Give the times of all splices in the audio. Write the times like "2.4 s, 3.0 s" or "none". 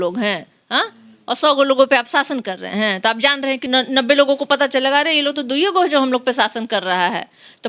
3.7 s